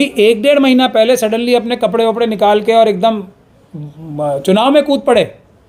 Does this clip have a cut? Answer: no; 0 cuts

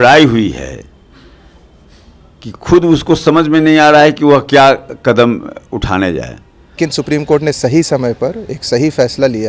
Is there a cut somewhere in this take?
yes; 1 cut; at 6.8 s

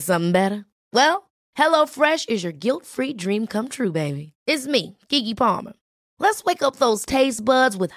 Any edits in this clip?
no; 0 cuts

